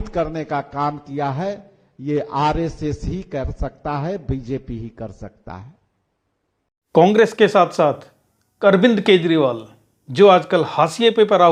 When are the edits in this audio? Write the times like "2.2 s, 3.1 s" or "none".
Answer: none